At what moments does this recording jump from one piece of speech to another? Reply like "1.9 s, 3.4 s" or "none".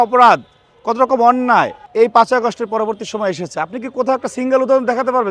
1.8 s